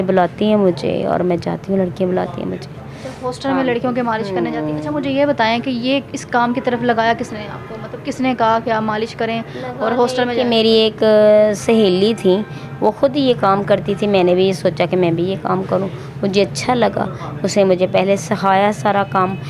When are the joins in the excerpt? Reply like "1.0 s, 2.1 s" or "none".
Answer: none